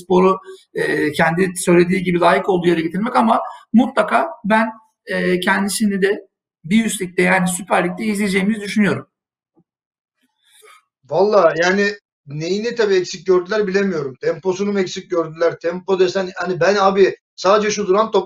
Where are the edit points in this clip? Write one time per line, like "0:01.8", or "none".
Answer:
none